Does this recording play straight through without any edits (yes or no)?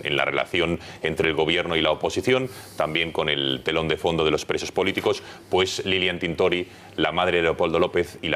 no